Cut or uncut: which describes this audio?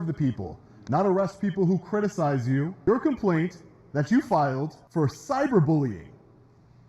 cut